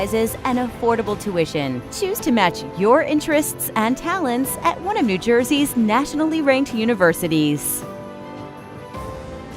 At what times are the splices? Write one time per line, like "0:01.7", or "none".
0:07.6